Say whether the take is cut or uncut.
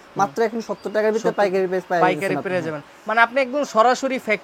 uncut